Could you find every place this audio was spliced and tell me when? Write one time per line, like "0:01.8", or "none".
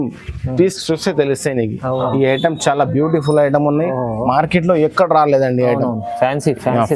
0:02.0